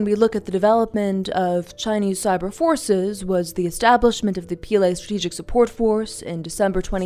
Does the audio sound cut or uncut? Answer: uncut